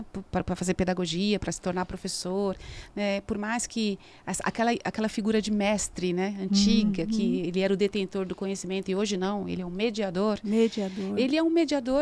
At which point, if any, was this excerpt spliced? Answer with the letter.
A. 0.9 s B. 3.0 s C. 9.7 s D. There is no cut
D